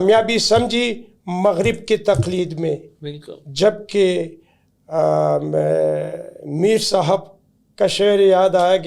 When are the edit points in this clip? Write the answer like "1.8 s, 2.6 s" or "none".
none